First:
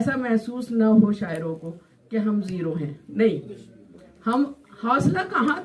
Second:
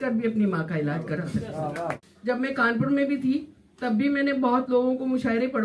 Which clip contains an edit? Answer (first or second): second